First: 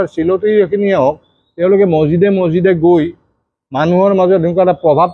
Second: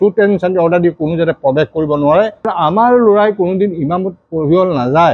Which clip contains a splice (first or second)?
second